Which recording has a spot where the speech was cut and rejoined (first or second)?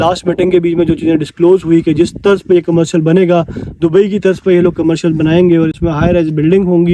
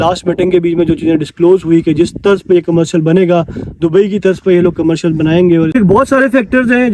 second